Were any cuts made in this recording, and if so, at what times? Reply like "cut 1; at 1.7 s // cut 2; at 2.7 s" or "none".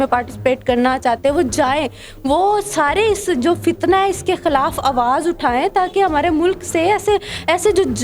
none